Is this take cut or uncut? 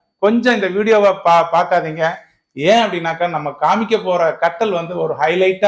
uncut